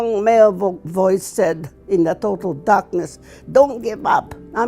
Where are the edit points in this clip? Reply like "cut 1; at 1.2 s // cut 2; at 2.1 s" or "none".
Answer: none